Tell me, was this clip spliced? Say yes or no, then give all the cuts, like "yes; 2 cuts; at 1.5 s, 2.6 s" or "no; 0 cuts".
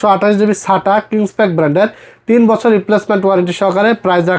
no; 0 cuts